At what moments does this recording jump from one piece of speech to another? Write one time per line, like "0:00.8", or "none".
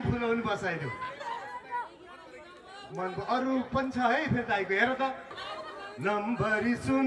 0:05.3